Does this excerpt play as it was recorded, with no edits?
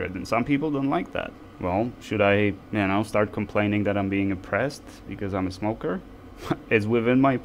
no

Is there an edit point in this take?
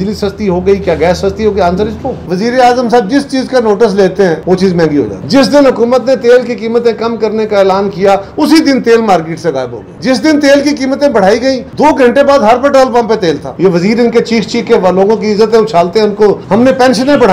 yes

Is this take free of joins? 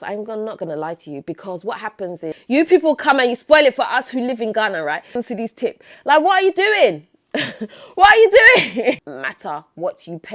no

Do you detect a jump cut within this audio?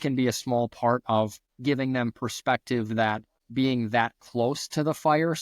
yes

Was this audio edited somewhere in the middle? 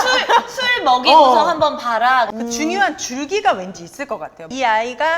yes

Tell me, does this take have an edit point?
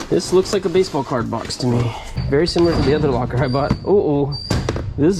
yes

